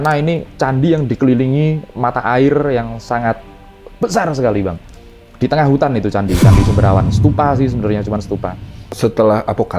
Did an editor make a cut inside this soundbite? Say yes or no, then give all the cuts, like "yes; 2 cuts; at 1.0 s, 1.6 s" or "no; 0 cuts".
yes; 1 cut; at 8.8 s